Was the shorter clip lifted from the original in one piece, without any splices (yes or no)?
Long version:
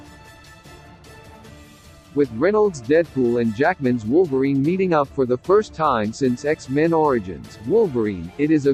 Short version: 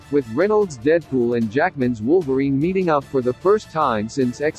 yes